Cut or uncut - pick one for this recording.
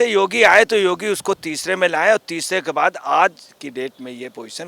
uncut